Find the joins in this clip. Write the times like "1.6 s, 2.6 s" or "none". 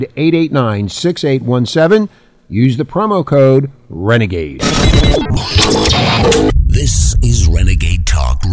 4.5 s